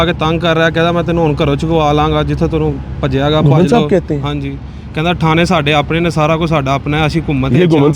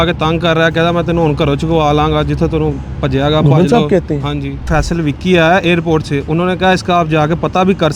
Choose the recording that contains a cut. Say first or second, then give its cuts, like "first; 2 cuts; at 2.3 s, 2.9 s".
second; 1 cut; at 4.7 s